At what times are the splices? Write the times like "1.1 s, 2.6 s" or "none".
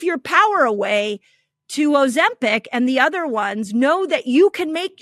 none